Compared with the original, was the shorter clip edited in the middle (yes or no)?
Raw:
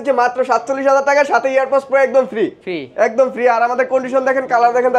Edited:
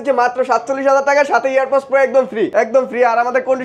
yes